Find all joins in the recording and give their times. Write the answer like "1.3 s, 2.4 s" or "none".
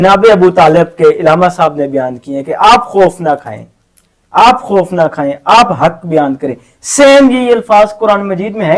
none